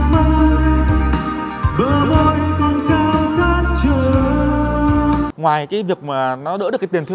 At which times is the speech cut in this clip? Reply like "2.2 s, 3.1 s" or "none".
5.3 s